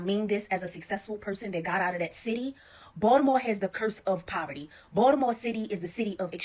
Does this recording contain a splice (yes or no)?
no